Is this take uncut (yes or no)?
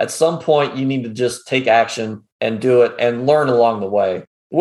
yes